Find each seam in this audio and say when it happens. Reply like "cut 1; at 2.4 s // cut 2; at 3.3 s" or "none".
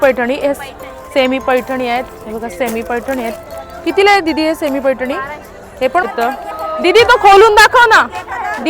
cut 1; at 6.0 s